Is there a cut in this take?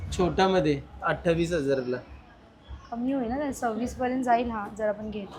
no; 0 cuts

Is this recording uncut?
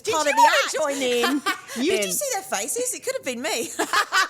no; 1 cut; at 1.9 s

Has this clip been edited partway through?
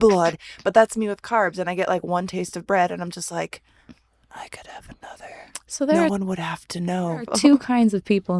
yes; 1 cut; at 7.3 s

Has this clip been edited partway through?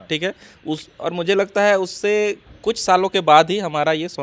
no; 0 cuts

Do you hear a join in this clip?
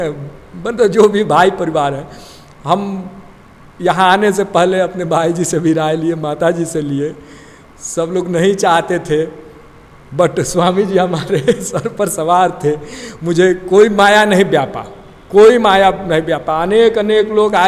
no; 0 cuts

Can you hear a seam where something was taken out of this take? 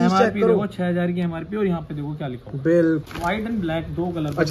yes; 1 cut; at 3.0 s

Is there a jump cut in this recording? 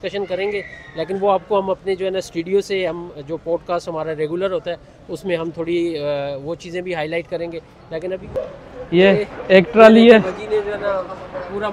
yes; 1 cut; at 8.4 s

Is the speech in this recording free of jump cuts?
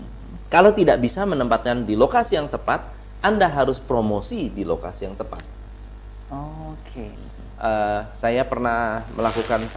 no; 1 cut; at 7.1 s

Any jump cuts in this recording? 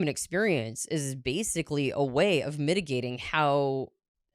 no; 0 cuts

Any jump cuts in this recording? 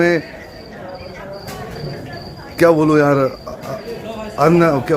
no; 0 cuts

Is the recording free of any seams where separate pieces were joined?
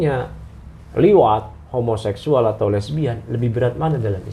yes; 0 cuts

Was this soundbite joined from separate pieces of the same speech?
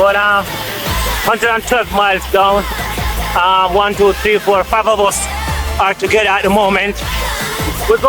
no; 0 cuts

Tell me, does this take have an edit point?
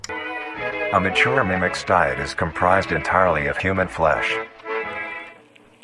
no; 0 cuts

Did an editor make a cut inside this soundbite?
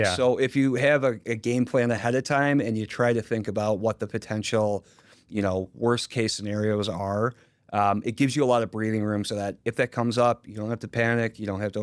no; 0 cuts

